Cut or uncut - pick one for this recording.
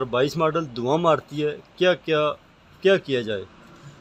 uncut